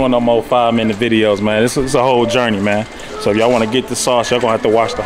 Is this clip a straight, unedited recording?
yes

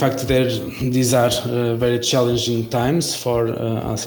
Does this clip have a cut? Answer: no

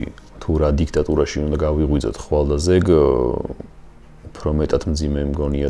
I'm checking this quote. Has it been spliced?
no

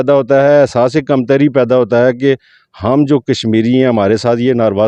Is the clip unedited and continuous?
yes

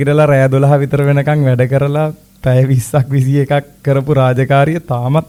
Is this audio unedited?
yes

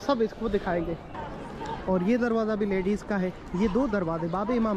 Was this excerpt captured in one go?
no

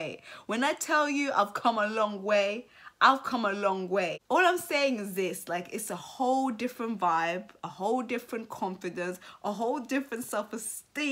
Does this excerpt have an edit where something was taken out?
yes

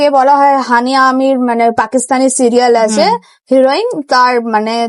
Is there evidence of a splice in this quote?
no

